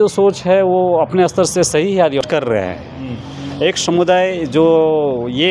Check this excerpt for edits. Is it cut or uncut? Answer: cut